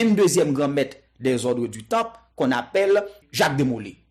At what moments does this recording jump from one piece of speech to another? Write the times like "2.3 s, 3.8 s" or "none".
3.2 s